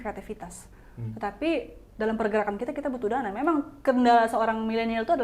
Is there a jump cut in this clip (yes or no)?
no